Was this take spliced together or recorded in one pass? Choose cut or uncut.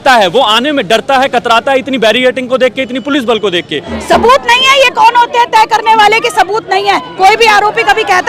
cut